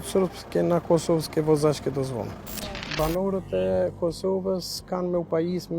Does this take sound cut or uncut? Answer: cut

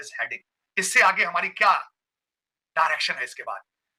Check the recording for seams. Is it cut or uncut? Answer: uncut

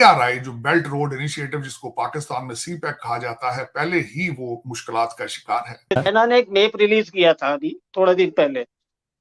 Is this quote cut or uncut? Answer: cut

